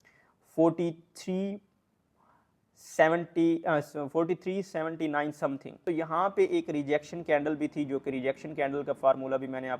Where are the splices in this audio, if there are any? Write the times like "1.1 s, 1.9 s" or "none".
5.8 s